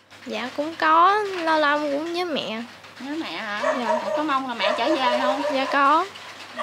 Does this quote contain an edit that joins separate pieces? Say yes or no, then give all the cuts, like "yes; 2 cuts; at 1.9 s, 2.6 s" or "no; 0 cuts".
no; 0 cuts